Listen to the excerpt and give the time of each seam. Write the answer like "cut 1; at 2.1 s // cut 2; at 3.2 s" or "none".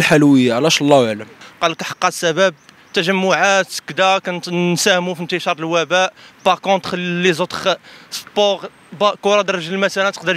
cut 1; at 1.5 s